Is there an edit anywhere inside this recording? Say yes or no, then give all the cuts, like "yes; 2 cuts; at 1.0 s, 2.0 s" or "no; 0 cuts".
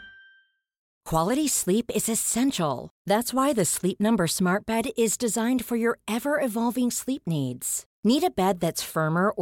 yes; 1 cut; at 1.0 s